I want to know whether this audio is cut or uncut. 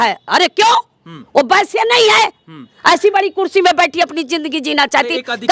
uncut